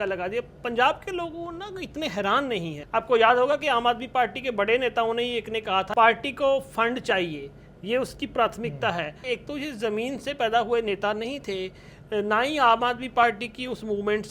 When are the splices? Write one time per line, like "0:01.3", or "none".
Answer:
0:02.8
0:05.9
0:09.2